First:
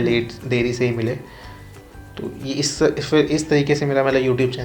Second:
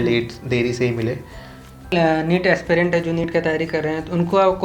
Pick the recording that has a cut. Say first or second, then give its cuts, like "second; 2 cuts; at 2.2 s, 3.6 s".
second; 1 cut; at 1.9 s